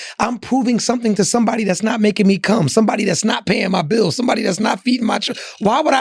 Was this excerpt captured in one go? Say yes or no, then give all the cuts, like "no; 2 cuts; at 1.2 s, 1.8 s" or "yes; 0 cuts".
yes; 0 cuts